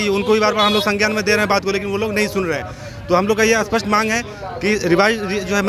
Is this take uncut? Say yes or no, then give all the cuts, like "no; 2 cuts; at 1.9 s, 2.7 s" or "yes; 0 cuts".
yes; 0 cuts